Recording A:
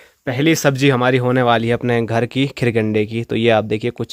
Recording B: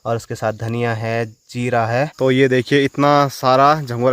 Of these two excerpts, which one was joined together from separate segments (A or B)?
B